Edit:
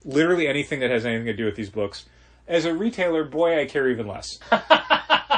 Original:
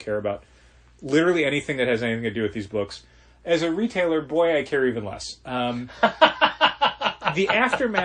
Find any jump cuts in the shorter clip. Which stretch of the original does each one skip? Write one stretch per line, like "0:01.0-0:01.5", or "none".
0:05.3-0:05.8

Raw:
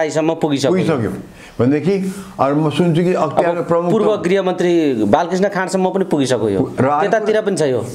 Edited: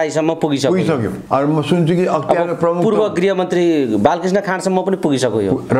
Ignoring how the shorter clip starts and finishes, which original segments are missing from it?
0:01.2-0:02.3

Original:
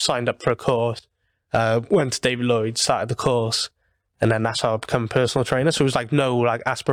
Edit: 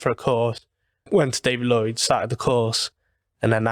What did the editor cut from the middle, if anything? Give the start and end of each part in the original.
0:01.5-0:01.8

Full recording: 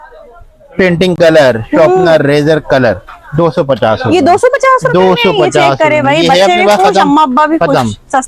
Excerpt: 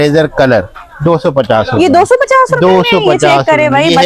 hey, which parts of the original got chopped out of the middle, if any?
none

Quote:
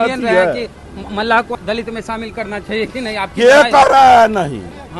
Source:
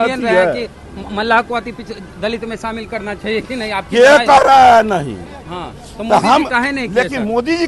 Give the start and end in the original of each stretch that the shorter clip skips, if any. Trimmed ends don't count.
0:01.5-0:02.1

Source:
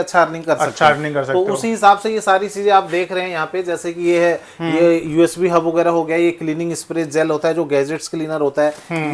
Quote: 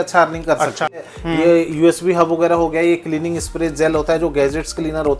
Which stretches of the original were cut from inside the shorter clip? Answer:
0:01.0-0:04.4

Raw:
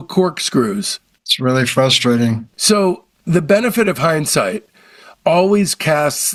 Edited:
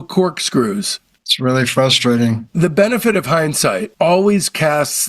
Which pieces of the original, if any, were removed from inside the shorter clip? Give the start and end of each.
0:02.5-0:03.2
0:04.6-0:05.1

